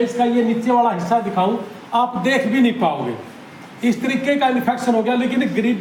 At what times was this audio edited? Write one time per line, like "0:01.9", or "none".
none